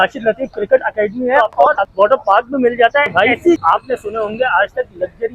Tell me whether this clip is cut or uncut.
cut